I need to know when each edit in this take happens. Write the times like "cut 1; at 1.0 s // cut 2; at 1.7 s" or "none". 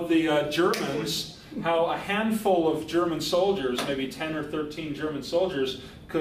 cut 1; at 4.7 s